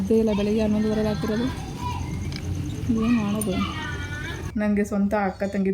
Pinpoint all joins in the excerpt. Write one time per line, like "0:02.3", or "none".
0:04.5